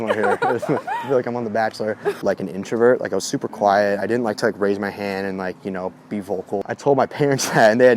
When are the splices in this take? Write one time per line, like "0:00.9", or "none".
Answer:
0:02.1
0:06.6

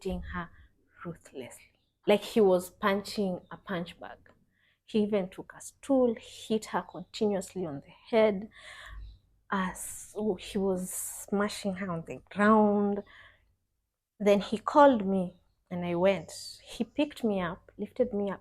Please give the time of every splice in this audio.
0:02.0

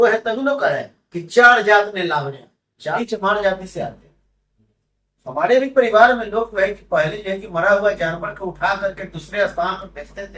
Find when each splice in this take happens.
0:03.0

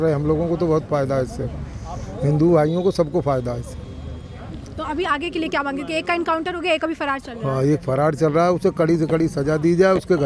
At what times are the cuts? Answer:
none

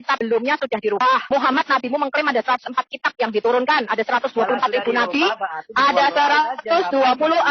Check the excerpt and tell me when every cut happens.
0:01.0

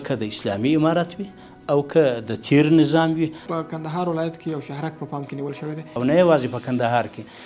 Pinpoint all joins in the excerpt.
0:03.4
0:05.9

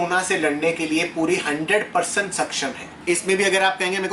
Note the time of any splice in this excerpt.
0:03.0

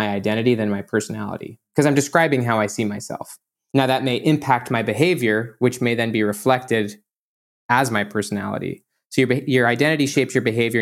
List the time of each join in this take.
0:03.6

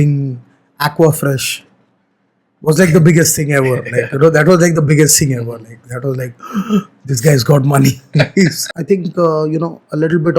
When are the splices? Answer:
0:08.6

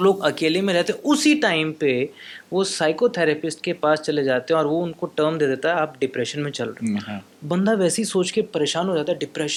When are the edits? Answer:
none

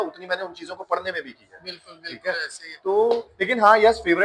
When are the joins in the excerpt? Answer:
none

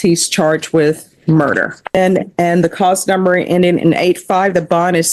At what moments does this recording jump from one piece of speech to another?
0:02.0

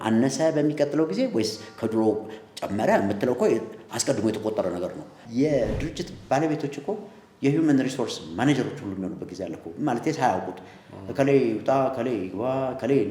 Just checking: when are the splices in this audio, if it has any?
0:05.1

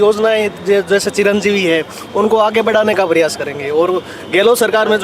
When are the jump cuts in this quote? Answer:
none

